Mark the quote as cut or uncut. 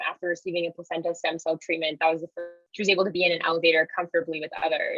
cut